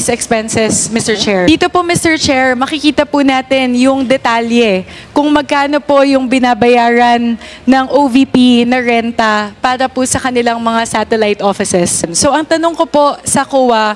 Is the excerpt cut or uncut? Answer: uncut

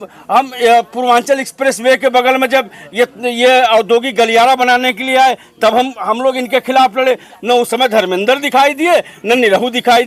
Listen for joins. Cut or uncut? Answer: uncut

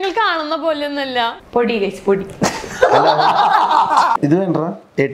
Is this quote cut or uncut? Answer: cut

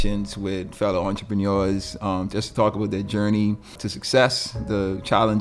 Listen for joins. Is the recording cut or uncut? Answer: cut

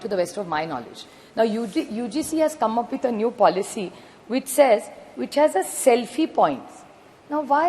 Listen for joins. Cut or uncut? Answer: uncut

